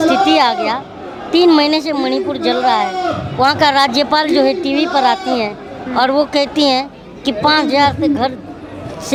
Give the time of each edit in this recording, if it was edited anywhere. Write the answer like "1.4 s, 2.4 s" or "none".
none